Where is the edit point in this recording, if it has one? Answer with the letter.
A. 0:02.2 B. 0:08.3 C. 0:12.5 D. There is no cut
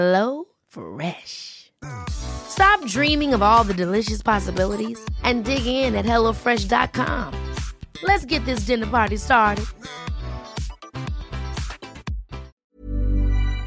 C